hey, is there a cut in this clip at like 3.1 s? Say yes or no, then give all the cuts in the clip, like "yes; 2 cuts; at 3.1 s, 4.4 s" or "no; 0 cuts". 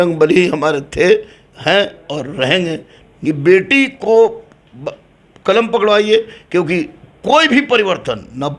yes; 1 cut; at 3.1 s